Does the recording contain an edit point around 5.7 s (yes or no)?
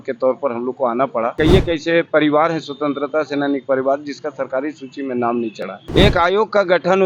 yes